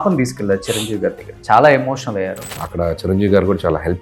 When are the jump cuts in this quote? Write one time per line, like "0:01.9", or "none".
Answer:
0:01.3
0:02.6